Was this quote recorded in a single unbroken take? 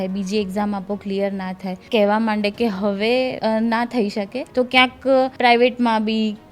no; 4 cuts; at 1.8 s, 3.3 s, 4.4 s, 5.3 s

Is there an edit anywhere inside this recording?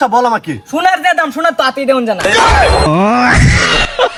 no; 0 cuts

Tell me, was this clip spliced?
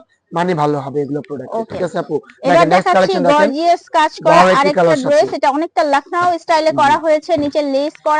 no; 0 cuts

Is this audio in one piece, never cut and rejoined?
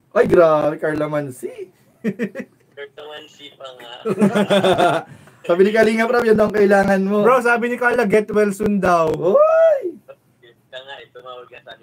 yes; 0 cuts

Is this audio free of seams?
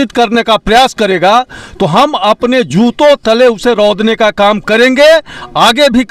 yes; 0 cuts

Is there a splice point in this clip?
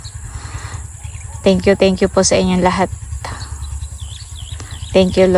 no; 0 cuts

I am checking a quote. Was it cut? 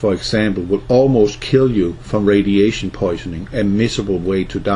no; 0 cuts

